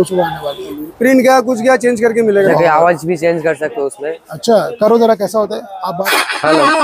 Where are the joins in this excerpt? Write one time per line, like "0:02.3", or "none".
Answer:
0:01.1
0:02.5
0:06.0